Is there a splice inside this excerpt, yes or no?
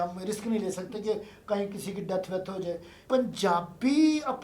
yes